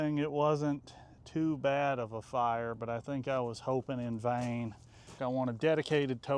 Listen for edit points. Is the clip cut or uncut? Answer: cut